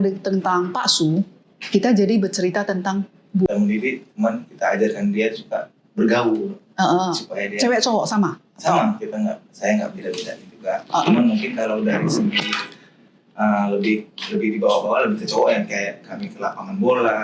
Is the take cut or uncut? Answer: cut